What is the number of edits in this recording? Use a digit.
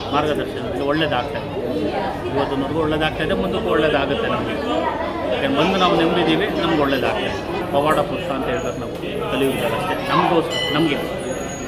1